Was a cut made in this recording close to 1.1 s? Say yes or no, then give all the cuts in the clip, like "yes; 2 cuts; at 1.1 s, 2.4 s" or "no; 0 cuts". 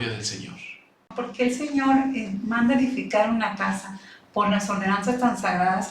yes; 1 cut; at 1.1 s